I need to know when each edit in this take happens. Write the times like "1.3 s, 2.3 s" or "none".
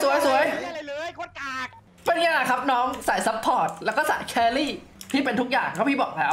1.8 s, 4.9 s